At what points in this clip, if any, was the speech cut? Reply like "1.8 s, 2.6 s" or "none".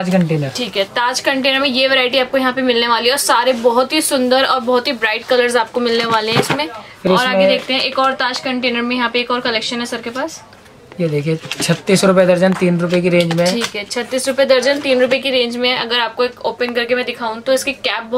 none